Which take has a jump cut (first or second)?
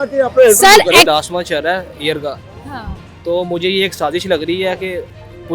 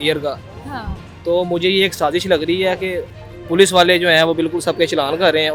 first